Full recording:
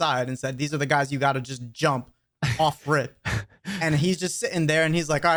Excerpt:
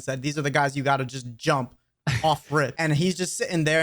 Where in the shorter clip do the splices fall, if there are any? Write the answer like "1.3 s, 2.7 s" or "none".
2.7 s